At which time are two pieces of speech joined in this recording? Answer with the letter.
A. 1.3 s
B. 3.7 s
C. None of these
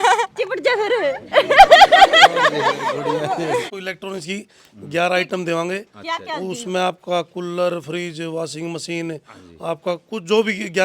B